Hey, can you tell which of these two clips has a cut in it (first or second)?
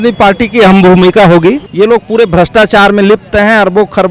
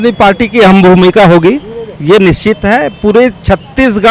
first